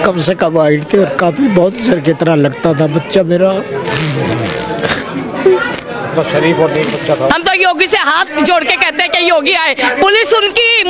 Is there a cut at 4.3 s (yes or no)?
no